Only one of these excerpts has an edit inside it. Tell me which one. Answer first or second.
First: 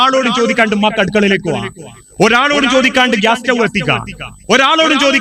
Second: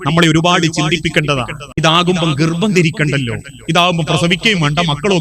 second